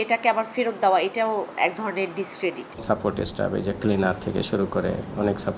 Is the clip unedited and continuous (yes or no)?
no